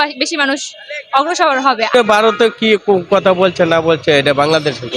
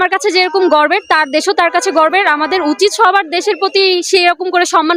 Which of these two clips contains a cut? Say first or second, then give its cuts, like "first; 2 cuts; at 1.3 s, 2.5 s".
first; 1 cut; at 1.9 s